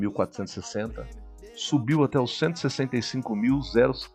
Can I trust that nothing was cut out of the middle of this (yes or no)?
yes